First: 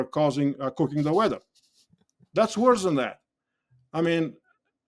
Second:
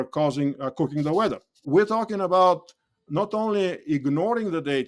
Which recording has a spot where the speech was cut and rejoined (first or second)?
second